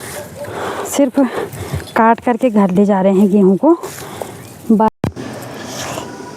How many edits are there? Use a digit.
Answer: 1